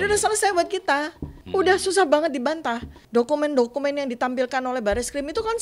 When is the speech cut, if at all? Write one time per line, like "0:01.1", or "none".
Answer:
0:01.3
0:03.0